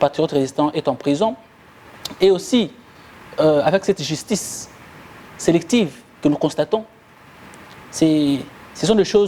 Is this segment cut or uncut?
uncut